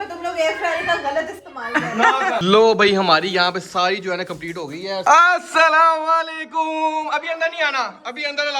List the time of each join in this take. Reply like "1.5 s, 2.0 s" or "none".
2.4 s, 5.0 s